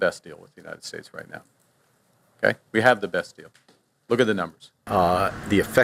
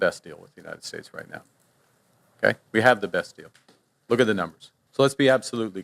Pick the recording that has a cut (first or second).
second